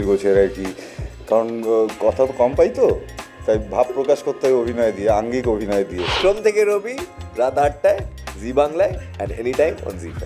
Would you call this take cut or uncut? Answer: cut